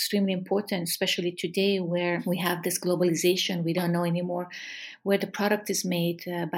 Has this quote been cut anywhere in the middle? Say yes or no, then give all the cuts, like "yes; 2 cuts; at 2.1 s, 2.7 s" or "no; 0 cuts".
yes; 1 cut; at 2.2 s